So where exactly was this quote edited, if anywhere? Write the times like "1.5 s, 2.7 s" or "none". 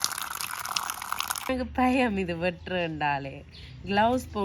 1.5 s